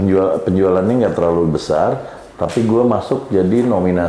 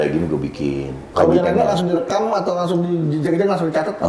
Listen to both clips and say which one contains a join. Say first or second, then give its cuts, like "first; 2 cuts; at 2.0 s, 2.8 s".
second; 1 cut; at 1.0 s